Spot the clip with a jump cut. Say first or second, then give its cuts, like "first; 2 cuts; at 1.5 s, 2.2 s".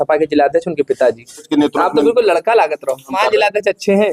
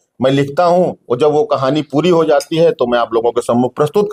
first; 2 cuts; at 1.5 s, 3.1 s